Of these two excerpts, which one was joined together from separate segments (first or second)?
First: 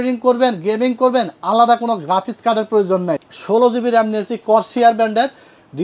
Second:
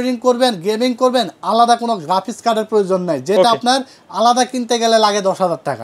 first